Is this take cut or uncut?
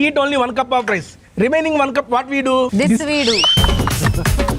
cut